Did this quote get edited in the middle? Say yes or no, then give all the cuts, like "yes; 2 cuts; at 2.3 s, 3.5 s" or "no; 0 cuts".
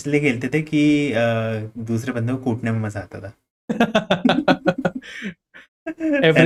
no; 0 cuts